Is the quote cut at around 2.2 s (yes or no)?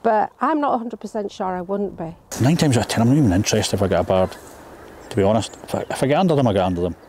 yes